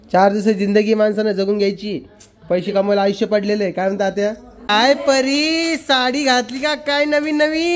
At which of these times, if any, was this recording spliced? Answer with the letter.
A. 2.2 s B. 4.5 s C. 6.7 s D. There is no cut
B